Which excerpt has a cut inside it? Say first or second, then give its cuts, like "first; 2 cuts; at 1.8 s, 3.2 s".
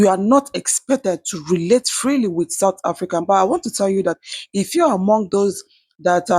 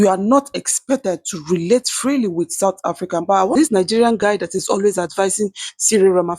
second; 1 cut; at 3.5 s